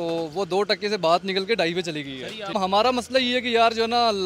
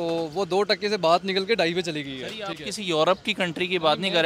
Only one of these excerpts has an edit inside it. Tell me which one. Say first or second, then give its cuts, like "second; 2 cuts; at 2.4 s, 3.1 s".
first; 1 cut; at 2.5 s